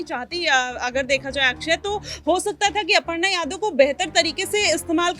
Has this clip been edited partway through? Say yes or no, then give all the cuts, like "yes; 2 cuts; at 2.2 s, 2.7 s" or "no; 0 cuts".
no; 0 cuts